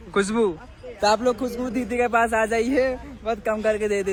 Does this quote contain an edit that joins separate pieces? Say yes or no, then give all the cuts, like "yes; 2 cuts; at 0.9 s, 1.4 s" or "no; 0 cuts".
no; 0 cuts